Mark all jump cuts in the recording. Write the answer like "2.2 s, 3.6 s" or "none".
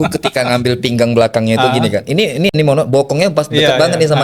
none

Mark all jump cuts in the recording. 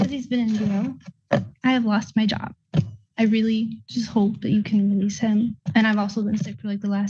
none

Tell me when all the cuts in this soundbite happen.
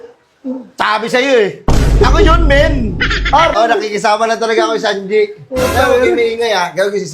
3.6 s

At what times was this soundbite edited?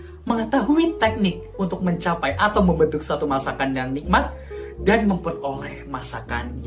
none

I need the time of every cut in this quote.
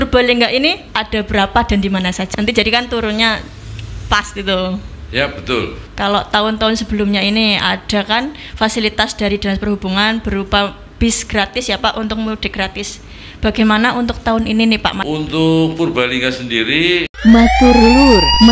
0.9 s, 2.2 s, 5.8 s, 15.0 s, 17.1 s

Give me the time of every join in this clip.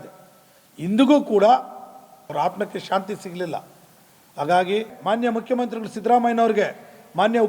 2.3 s, 4.9 s

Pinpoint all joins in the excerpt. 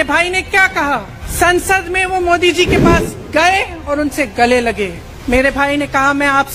1.2 s, 5.1 s

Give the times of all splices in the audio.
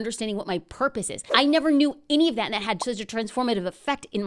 1.2 s

